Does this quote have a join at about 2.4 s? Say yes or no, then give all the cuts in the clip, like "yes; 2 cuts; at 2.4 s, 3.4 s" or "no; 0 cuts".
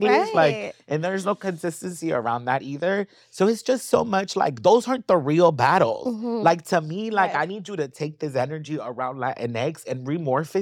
no; 0 cuts